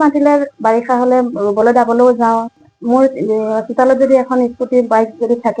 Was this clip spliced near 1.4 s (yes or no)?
no